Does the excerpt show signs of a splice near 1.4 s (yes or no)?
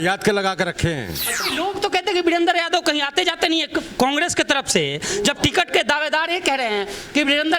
yes